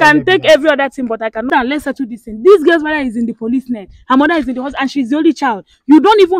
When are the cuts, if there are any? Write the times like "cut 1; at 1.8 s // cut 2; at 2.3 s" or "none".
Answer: cut 1; at 1.5 s